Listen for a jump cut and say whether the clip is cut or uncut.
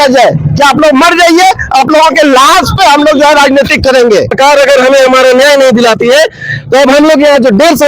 cut